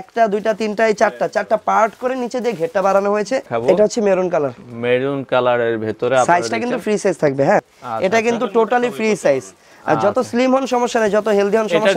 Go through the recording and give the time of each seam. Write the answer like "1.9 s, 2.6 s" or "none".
3.5 s, 7.7 s